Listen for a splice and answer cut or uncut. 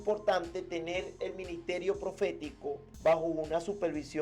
cut